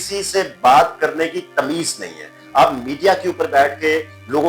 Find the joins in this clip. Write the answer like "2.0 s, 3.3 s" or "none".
none